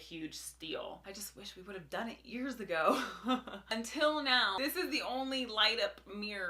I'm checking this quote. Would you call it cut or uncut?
uncut